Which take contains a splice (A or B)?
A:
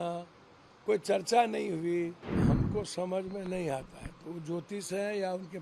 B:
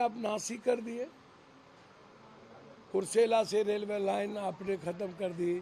A